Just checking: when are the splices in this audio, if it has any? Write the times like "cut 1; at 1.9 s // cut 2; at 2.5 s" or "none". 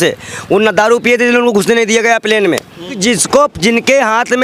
cut 1; at 3.0 s

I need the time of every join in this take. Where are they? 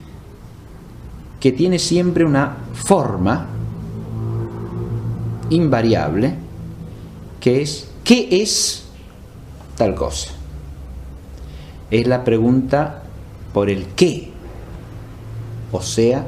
cut 1; at 9.8 s

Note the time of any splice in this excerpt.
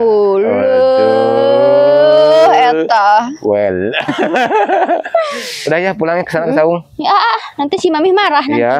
none

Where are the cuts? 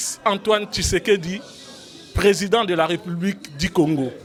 none

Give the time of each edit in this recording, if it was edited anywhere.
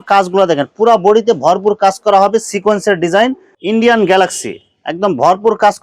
cut 1; at 3.5 s

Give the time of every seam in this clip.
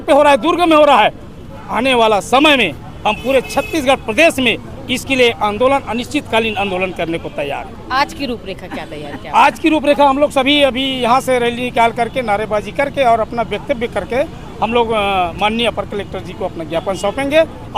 none

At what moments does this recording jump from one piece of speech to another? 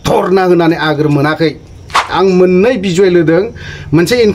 cut 1; at 2.1 s

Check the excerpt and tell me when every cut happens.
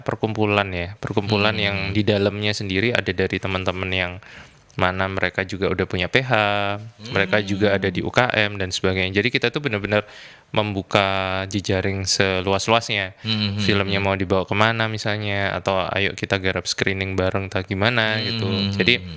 none

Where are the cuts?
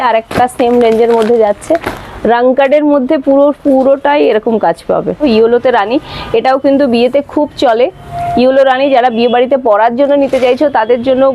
cut 1; at 5.2 s

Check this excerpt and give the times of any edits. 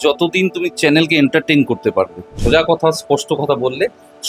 cut 1; at 2.3 s

